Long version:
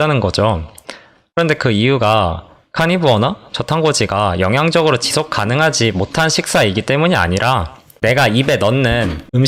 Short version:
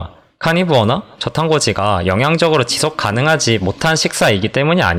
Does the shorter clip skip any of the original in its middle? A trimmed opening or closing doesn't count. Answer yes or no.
no